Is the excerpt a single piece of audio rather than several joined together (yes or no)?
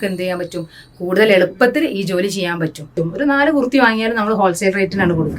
no